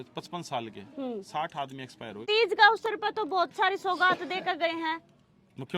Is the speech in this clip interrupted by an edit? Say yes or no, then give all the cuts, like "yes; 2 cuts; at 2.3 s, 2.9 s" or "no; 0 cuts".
yes; 1 cut; at 2.2 s